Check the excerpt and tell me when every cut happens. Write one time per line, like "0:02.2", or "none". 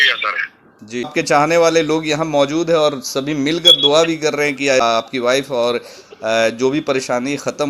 0:01.1
0:04.8